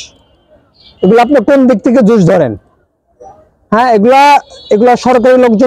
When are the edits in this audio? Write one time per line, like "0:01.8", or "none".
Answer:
none